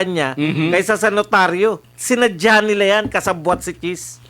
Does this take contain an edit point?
yes; 1 cut; at 1.9 s

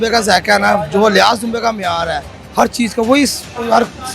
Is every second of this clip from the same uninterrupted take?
yes; 0 cuts

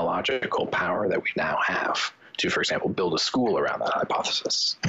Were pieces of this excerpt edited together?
no; 0 cuts

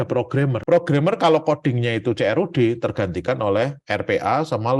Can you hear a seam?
no; 0 cuts

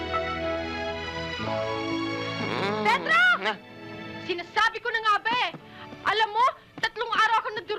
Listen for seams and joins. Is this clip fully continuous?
yes; 0 cuts

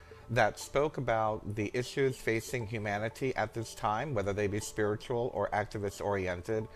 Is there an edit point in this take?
yes; 1 cut; at 5.3 s

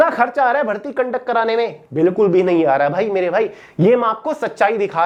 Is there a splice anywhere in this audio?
no; 0 cuts

